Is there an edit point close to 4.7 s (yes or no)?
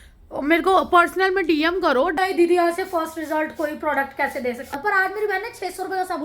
yes